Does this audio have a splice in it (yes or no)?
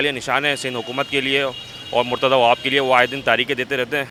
no